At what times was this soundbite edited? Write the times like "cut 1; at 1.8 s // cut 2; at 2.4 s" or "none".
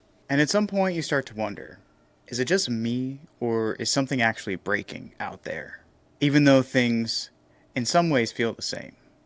none